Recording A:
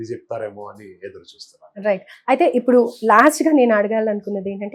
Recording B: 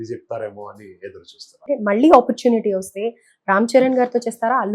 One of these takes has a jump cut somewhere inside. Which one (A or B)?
B